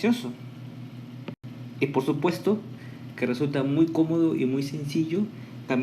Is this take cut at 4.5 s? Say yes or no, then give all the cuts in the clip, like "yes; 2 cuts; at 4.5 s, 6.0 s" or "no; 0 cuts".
yes; 1 cut; at 4.5 s